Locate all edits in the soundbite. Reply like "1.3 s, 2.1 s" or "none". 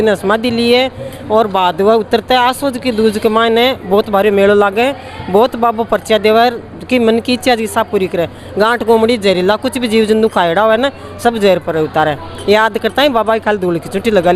none